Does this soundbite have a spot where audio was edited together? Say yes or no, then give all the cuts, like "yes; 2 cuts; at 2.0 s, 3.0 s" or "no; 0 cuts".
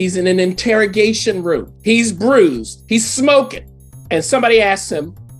yes; 1 cut; at 1.7 s